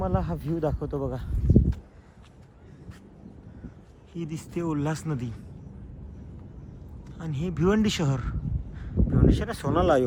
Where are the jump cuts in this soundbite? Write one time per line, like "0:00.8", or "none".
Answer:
none